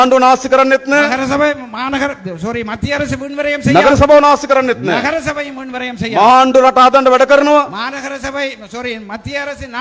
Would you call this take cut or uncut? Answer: uncut